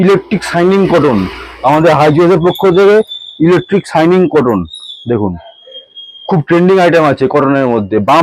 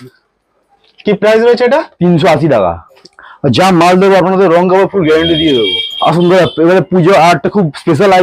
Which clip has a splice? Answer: second; 2 cuts; at 2.9 s, 5.8 s

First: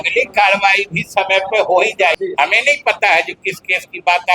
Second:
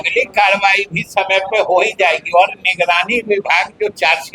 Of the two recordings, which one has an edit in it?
first; 1 cut; at 2.2 s

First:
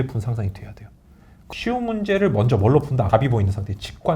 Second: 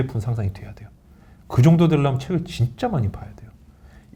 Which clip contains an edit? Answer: first; 2 cuts; at 1.3 s, 3.1 s

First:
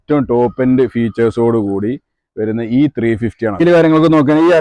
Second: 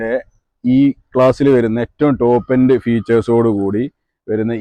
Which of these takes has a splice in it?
first; 1 cut; at 3.6 s

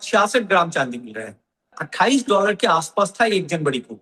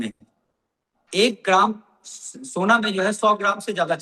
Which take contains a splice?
first; 1 cut; at 1.7 s

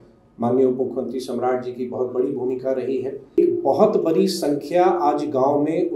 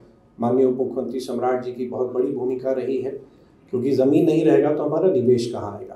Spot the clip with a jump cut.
first; 1 cut; at 3.4 s

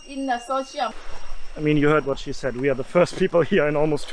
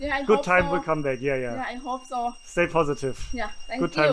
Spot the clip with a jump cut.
first; 1 cut; at 0.9 s

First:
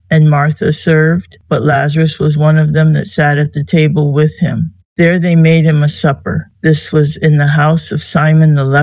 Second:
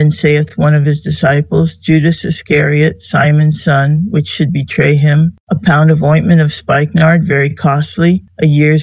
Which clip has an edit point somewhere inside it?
first; 1 cut; at 1.3 s

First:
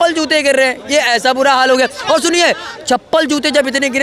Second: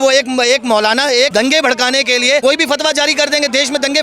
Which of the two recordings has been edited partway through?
second; 2 cuts; at 1.3 s, 2.4 s

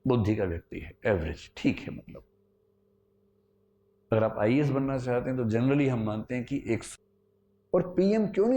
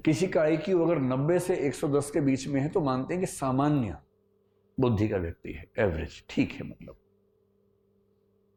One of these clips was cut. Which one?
first; 1 cut; at 6.9 s

